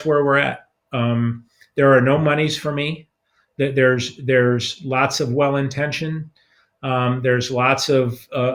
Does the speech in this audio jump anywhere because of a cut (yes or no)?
no